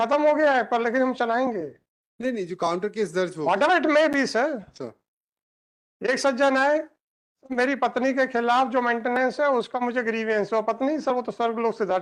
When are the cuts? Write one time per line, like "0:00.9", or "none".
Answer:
none